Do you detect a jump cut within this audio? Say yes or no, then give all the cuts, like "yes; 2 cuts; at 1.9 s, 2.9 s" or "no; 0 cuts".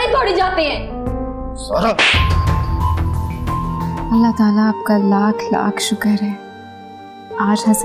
yes; 1 cut; at 4.0 s